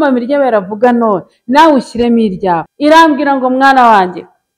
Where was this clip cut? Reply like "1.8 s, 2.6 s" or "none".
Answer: 2.7 s